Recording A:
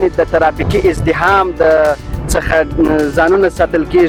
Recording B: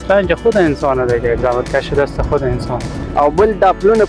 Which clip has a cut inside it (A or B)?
B